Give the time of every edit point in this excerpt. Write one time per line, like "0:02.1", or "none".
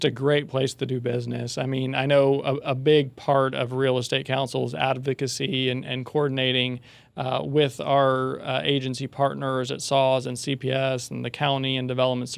none